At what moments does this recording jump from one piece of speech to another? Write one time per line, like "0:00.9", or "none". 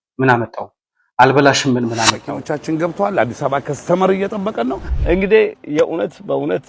0:02.3